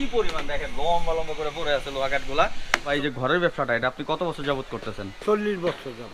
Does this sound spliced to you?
yes; 1 cut; at 2.9 s

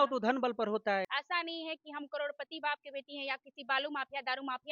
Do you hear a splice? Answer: yes; 1 cut; at 1.1 s

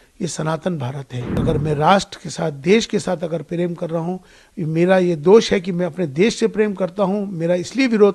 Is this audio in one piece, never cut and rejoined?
no; 1 cut; at 1.4 s

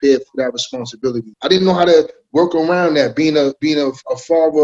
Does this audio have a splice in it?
yes; 1 cut; at 1.3 s

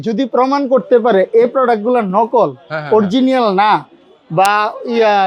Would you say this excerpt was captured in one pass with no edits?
yes; 0 cuts

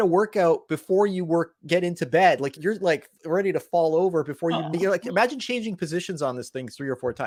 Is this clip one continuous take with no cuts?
yes; 0 cuts

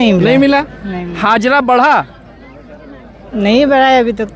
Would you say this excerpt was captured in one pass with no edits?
yes; 0 cuts

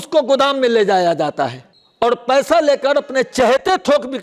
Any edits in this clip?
no; 0 cuts

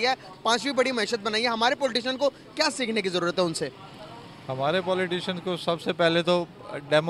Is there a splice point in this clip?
no; 0 cuts

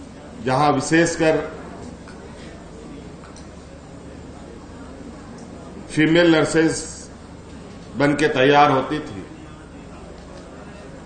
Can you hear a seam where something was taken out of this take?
no; 0 cuts

